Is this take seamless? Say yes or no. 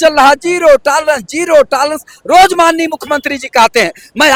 yes